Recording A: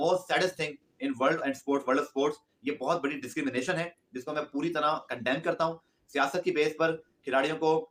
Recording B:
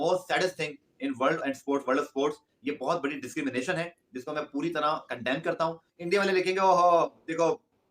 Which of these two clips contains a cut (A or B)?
B